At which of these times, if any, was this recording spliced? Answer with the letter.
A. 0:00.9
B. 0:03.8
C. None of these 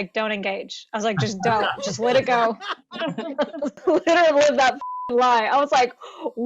B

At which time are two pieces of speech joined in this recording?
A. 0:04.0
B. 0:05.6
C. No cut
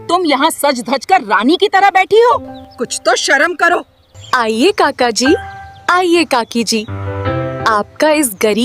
A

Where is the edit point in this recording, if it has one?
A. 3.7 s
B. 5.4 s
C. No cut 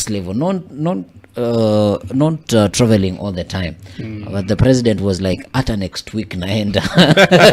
C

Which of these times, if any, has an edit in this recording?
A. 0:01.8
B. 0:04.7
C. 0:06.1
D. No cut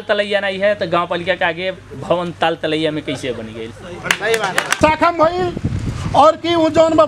D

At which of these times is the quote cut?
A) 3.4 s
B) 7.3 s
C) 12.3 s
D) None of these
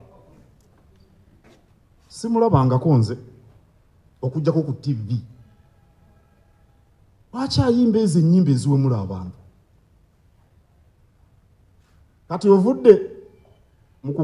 D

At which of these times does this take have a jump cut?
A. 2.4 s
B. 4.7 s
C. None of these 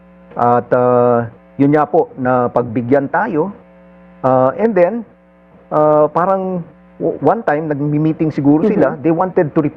C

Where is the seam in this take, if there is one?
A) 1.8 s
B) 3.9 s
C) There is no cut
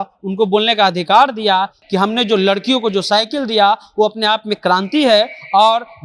A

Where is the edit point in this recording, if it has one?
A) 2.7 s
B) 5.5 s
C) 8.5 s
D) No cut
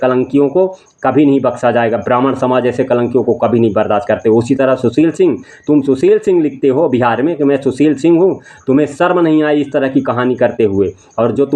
D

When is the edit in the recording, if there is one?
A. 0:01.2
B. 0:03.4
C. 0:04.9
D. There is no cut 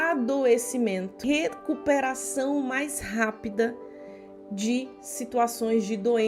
A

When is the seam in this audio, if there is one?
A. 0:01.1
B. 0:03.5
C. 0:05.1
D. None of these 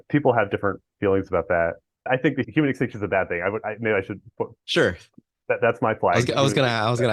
D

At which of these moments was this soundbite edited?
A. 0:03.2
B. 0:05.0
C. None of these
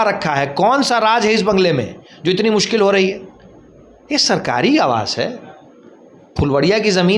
C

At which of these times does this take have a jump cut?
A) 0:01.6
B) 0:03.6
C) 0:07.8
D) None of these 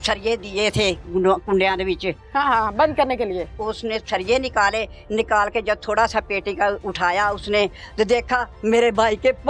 B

